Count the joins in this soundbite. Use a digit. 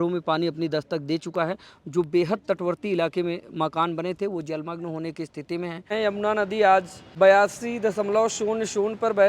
2